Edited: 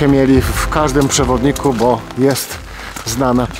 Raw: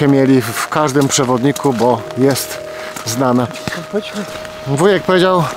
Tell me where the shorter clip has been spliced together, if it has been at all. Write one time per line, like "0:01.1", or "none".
none